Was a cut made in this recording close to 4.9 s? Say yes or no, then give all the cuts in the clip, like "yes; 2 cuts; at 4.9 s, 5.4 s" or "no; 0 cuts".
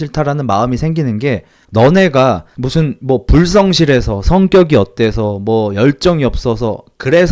no; 2 cuts; at 1.5 s, 2.5 s